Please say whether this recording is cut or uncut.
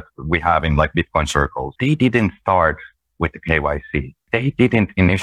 cut